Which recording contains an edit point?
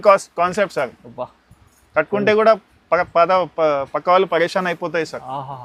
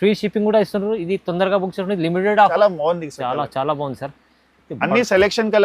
second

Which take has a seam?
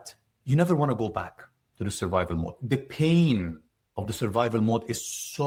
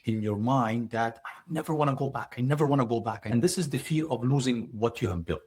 second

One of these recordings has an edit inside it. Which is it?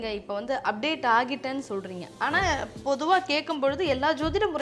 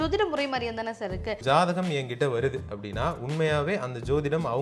second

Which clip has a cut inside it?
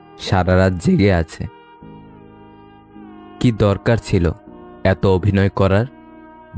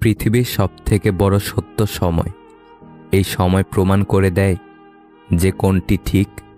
first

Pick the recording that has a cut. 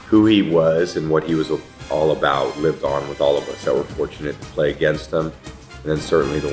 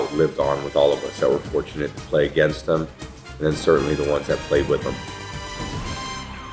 second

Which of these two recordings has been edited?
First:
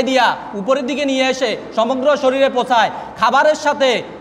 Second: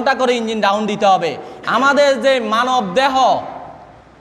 second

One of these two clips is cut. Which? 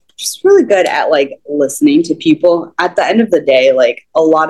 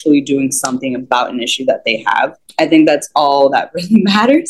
second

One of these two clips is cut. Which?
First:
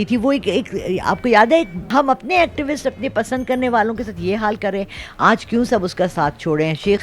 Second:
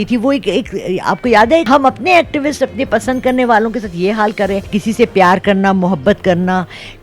second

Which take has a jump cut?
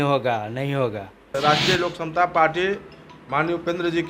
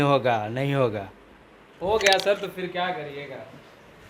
first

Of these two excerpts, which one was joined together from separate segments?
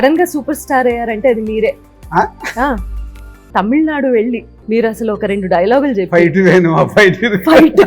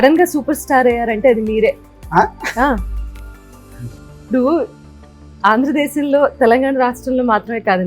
first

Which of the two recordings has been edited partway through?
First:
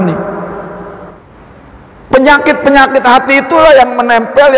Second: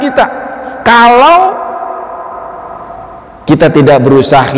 first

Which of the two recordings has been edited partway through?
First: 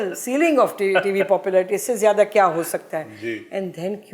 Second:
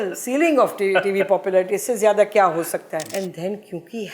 second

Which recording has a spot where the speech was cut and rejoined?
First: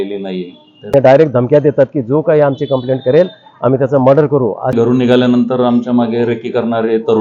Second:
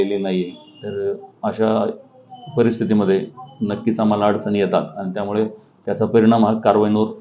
first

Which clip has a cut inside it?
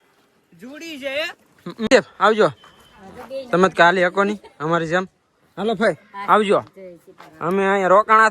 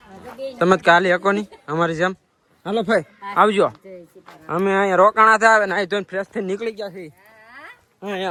first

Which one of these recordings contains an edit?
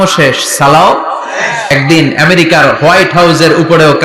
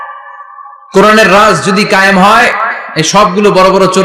first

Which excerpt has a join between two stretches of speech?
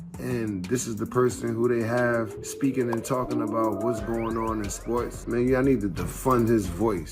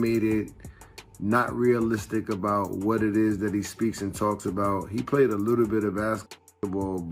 first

